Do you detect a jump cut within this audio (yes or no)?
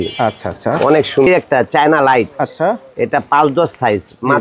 yes